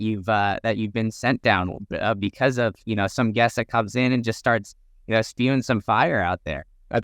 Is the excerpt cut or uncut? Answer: uncut